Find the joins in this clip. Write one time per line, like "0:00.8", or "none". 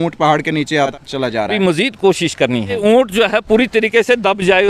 0:01.5
0:02.8